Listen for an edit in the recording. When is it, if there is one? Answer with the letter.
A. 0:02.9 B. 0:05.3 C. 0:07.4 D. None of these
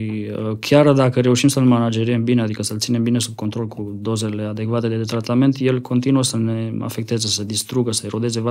D